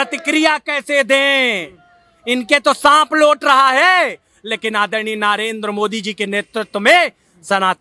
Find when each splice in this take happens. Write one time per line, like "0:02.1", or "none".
none